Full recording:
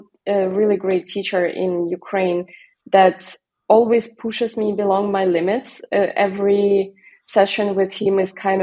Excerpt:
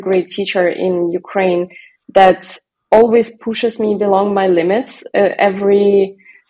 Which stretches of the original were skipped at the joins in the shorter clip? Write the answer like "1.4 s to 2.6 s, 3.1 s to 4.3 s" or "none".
none